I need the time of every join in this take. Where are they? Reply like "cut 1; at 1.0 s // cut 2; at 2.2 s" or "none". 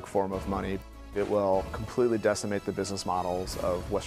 cut 1; at 1.1 s